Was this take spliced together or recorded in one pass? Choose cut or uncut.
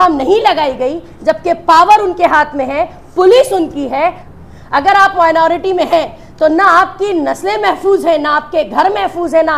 cut